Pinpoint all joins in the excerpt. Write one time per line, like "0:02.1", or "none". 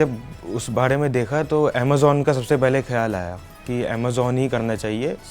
none